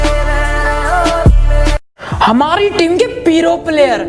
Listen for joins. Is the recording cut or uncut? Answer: cut